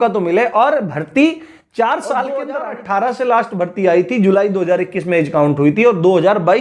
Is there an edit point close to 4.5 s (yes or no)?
no